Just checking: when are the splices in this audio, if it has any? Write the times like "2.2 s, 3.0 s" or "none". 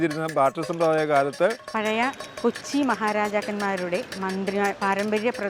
1.7 s